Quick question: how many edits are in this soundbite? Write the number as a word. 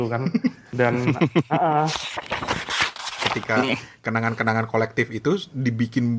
two